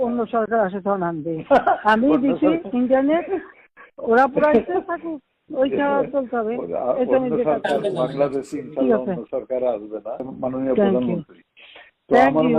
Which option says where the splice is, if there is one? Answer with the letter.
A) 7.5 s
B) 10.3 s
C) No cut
B